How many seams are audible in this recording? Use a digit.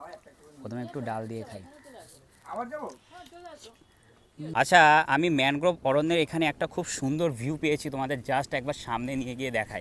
1